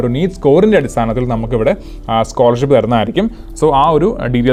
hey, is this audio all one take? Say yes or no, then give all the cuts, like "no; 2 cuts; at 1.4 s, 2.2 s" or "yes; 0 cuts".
yes; 0 cuts